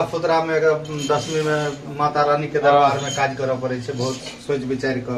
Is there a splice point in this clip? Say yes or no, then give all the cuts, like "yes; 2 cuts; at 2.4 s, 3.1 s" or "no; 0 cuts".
no; 0 cuts